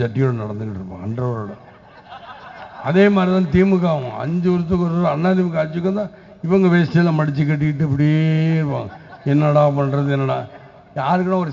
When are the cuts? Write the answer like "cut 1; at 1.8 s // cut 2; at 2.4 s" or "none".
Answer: none